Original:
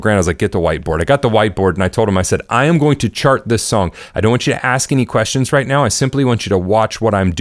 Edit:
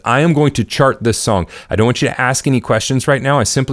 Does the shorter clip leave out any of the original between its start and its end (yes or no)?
no